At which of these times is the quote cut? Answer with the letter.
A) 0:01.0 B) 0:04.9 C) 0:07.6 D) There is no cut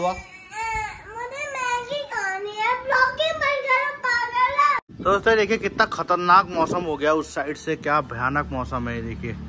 B